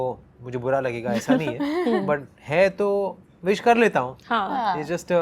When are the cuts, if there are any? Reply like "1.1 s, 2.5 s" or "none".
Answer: none